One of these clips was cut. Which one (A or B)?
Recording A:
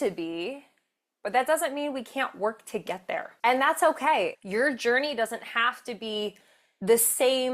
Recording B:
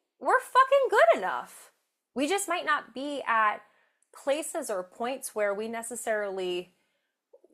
A